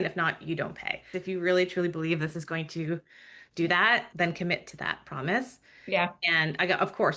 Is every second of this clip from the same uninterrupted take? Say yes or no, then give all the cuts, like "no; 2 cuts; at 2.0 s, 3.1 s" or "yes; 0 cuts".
no; 1 cut; at 1.2 s